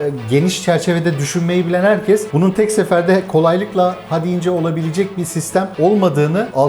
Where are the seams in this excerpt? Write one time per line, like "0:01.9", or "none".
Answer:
none